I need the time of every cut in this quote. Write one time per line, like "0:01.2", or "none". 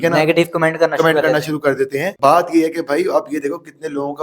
0:02.1